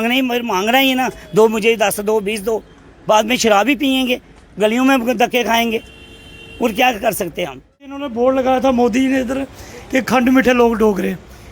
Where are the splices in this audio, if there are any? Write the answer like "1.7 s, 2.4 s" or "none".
8.0 s